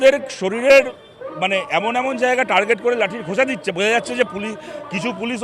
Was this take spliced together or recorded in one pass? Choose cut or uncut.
uncut